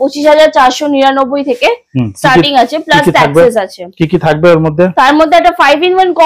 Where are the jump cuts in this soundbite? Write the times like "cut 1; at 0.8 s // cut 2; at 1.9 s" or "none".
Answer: none